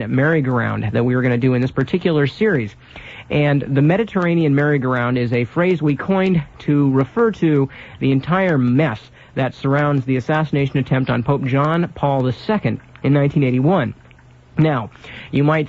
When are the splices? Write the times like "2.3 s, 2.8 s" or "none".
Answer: 3.6 s